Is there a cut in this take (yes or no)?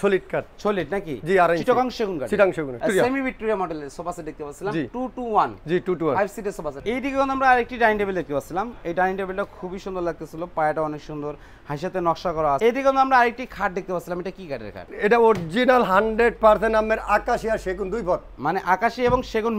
yes